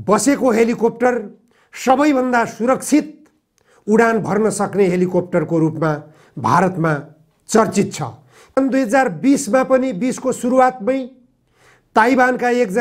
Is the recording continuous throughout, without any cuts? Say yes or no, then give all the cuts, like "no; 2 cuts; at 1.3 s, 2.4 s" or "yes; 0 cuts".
no; 1 cut; at 8.6 s